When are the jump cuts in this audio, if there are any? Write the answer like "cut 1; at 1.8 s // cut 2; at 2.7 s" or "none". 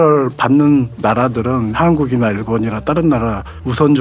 cut 1; at 1.7 s